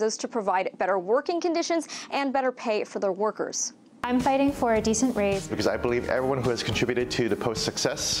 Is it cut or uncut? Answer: uncut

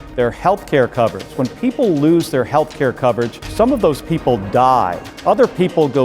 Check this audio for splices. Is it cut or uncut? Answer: cut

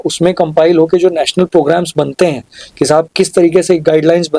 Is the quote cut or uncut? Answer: uncut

